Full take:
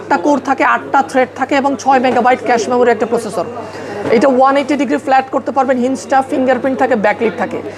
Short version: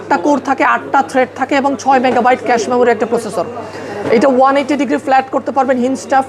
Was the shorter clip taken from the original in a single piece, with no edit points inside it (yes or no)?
yes